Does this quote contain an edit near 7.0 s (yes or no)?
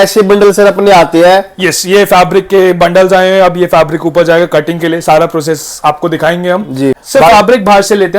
yes